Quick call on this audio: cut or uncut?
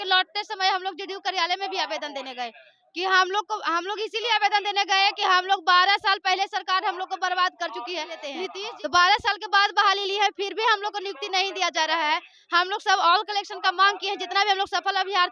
cut